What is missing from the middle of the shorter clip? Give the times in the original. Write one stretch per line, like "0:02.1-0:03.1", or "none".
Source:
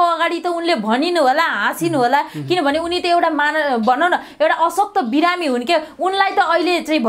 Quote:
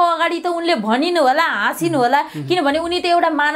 none